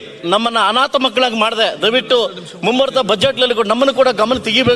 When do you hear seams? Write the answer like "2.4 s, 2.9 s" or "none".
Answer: none